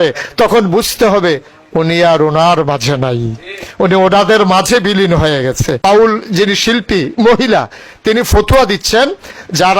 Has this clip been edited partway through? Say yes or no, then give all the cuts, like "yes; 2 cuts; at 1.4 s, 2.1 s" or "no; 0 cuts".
yes; 1 cut; at 5.8 s